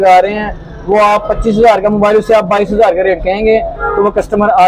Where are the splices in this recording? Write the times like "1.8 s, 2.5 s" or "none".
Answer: none